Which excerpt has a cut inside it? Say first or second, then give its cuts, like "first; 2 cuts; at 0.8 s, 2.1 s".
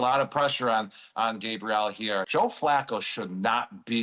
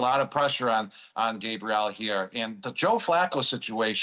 first; 1 cut; at 2.3 s